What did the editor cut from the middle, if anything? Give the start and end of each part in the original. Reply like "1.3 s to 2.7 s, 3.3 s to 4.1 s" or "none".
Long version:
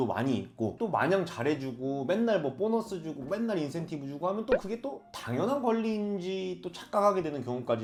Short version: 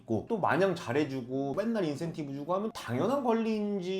2.0 s to 3.2 s, 4.4 s to 5.1 s

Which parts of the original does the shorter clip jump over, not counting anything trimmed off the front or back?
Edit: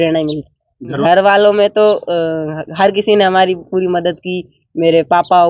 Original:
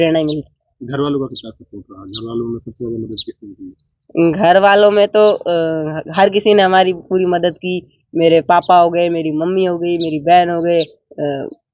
1.0 s to 4.4 s

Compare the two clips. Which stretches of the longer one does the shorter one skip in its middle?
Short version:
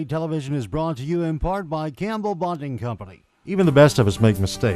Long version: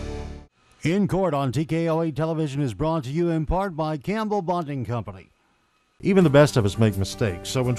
5.6 s to 6.1 s

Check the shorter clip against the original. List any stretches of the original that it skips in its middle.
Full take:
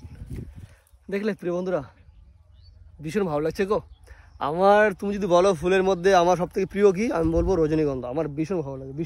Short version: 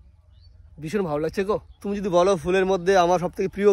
4.1 s to 5.0 s

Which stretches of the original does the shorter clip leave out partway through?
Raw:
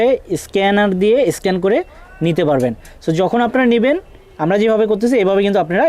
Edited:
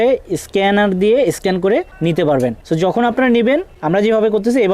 1.9 s to 2.1 s, 2.8 s to 3.0 s, 4.1 s to 4.3 s

